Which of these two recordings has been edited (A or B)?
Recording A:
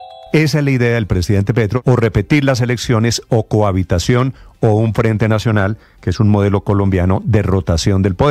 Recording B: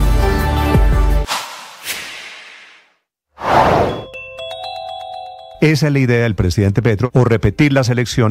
B